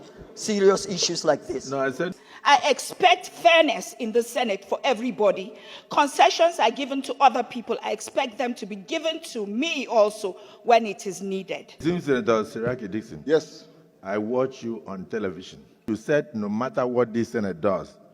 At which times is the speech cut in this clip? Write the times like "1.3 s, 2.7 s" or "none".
2.1 s, 11.7 s, 15.8 s